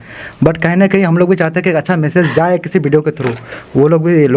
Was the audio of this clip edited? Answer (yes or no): no